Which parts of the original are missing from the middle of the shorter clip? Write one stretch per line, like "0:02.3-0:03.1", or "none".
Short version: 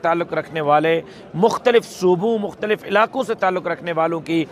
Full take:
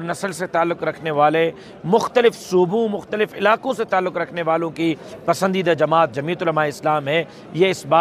none